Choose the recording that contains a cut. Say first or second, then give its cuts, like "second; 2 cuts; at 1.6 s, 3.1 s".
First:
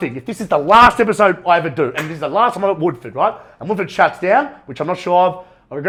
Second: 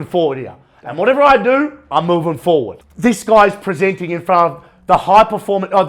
second; 1 cut; at 2.8 s